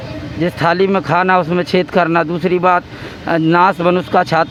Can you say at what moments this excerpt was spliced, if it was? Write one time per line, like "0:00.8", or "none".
none